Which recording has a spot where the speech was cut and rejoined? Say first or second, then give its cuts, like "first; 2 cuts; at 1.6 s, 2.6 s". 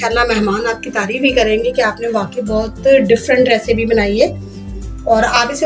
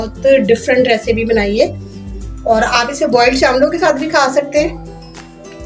second; 1 cut; at 4.8 s